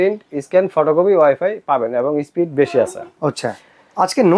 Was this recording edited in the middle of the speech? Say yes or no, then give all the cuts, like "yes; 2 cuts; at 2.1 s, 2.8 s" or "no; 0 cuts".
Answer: no; 0 cuts